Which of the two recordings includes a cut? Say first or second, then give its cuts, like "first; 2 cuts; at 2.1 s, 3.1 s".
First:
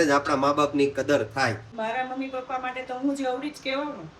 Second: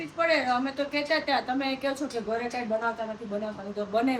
first; 1 cut; at 1.7 s